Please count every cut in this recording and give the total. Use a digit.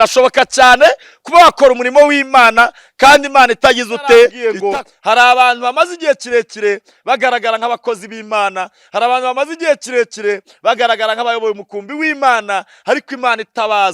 1